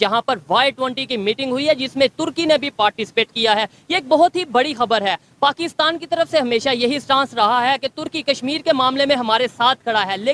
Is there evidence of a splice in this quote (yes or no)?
no